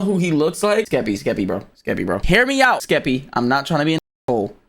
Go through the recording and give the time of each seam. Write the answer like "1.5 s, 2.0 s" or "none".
0.9 s, 2.2 s, 2.8 s

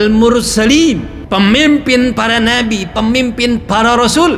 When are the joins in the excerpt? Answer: 1.1 s

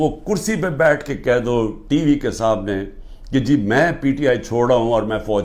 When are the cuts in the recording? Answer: none

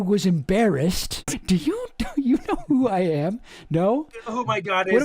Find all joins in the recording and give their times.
1.4 s

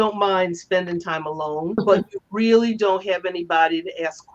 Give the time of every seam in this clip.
1.8 s

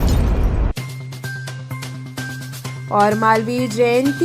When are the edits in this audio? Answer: none

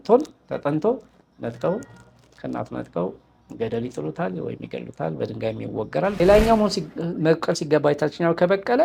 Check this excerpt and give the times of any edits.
6.2 s

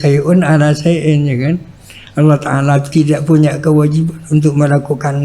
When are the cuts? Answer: 2.9 s

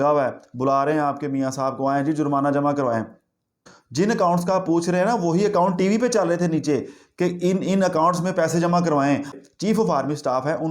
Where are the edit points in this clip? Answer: 3.7 s, 9.4 s

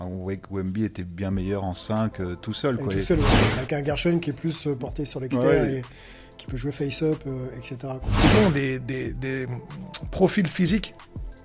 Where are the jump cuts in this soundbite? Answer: 8.2 s

